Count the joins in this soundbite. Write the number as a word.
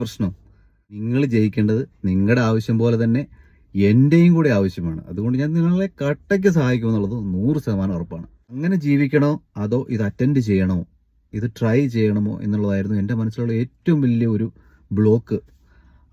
two